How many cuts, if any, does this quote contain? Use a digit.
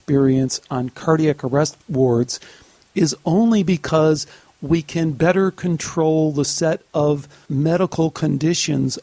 1